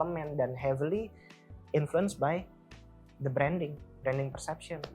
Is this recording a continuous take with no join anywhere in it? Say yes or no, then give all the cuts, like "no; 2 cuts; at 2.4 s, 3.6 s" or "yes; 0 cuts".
yes; 0 cuts